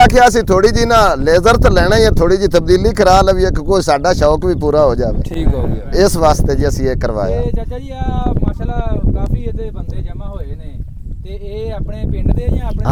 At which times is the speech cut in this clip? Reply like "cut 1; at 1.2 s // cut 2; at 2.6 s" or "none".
none